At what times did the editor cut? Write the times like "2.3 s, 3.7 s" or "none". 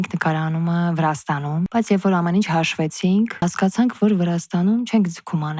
1.7 s, 3.4 s

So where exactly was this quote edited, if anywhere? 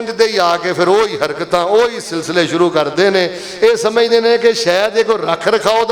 none

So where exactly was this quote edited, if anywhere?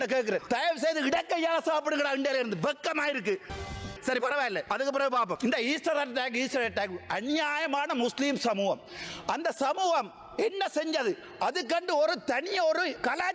none

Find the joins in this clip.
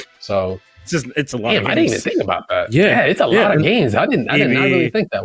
none

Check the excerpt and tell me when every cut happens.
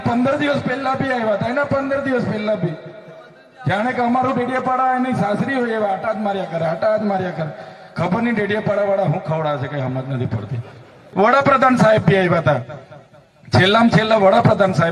11.0 s

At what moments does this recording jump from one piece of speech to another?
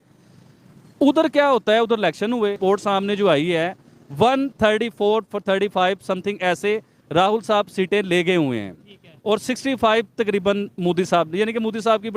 2.6 s

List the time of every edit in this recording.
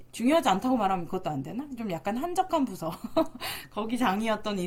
none

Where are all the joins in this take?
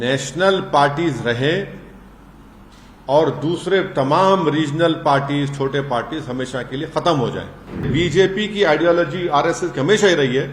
7.9 s

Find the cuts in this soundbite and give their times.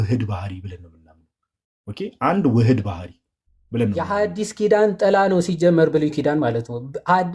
4.0 s

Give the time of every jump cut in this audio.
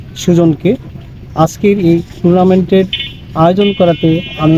none

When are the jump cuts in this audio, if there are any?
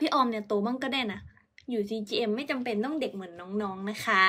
none

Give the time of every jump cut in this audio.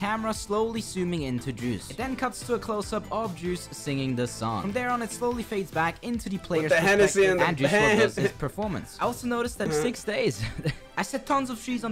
9.7 s

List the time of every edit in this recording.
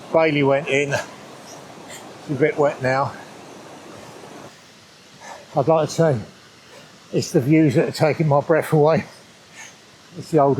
4.5 s

